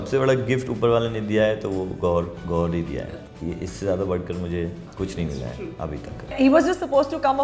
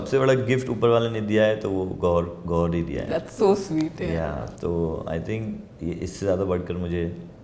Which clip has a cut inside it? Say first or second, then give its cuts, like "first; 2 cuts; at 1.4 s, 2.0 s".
first; 3 cuts; at 3.1 s, 4.9 s, 6.3 s